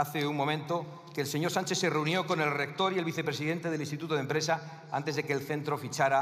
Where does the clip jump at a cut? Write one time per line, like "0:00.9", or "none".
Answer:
none